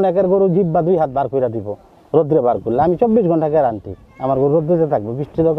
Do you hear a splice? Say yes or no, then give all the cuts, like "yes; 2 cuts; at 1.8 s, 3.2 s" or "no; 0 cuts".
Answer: no; 0 cuts